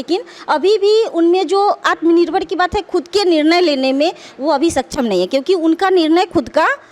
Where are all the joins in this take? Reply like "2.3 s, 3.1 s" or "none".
none